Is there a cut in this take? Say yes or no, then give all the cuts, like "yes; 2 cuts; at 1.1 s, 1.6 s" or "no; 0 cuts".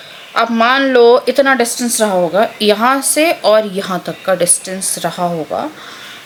no; 0 cuts